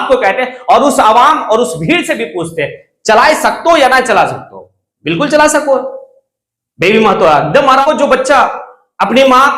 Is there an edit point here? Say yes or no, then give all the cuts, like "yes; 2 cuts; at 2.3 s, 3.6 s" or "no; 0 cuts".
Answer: yes; 1 cut; at 7.9 s